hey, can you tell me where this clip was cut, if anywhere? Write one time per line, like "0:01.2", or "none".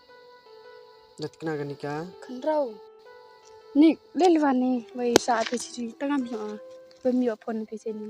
0:01.1